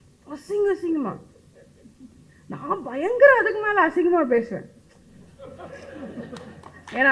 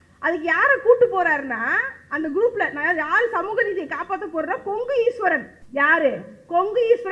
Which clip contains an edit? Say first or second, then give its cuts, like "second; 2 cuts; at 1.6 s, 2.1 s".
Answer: second; 1 cut; at 5.6 s